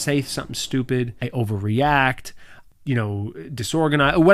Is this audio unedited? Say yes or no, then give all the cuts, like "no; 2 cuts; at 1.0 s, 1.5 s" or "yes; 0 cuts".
no; 2 cuts; at 1.2 s, 2.6 s